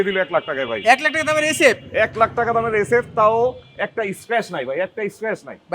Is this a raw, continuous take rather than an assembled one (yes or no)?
yes